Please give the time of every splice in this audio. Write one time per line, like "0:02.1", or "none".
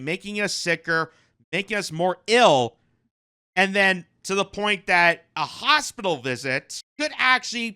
0:06.8

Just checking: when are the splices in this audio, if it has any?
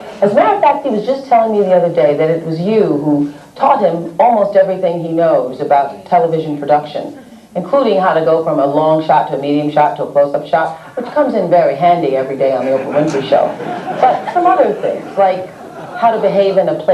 0:02.9

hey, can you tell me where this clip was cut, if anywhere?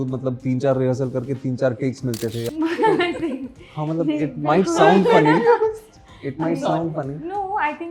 0:02.5

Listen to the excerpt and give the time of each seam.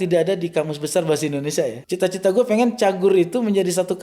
0:01.8

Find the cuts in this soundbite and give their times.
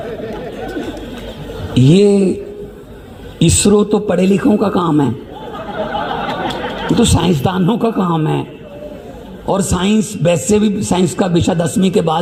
none

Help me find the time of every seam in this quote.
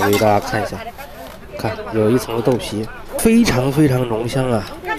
0:03.1

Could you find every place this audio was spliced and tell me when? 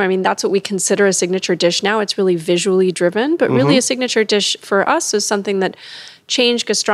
none

